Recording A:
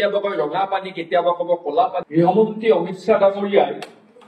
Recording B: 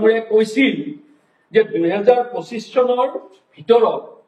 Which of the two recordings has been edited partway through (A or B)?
A